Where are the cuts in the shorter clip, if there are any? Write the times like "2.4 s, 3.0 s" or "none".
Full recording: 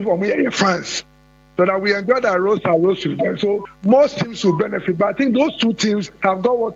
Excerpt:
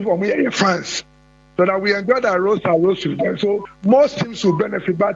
none